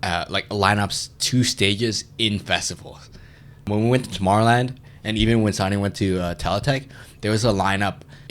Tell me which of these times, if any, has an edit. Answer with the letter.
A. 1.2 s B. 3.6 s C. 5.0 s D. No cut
B